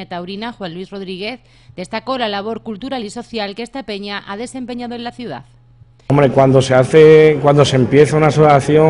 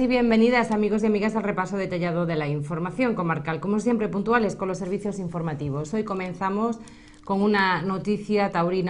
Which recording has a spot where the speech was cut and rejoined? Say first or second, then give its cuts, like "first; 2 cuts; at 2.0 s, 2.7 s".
first; 1 cut; at 7.3 s